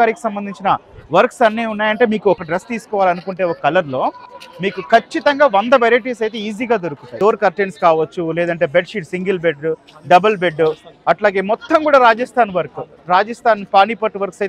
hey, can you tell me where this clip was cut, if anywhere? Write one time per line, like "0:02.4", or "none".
0:02.4
0:07.2